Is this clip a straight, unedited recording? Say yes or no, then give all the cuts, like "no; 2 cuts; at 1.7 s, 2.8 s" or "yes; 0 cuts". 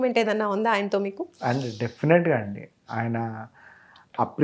yes; 0 cuts